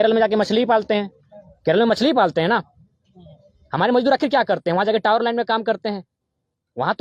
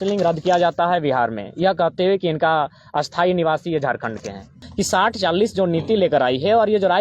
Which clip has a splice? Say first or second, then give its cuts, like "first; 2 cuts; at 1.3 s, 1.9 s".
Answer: second; 1 cut; at 4.6 s